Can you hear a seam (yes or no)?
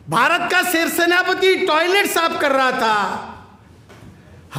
no